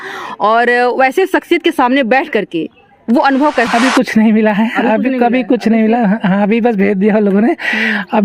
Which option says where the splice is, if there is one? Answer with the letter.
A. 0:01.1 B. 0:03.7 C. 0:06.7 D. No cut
B